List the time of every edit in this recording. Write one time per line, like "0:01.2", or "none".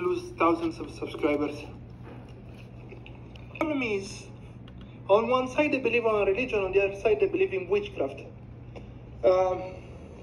0:03.3